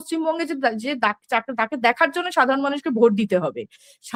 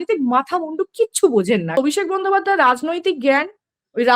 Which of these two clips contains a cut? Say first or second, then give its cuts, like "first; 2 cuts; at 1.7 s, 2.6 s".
second; 1 cut; at 1.8 s